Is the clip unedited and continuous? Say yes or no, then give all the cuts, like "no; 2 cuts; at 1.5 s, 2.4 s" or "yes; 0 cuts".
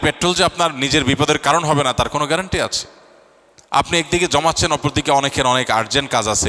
yes; 0 cuts